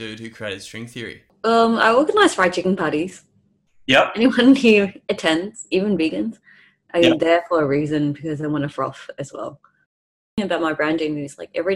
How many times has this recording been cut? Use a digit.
2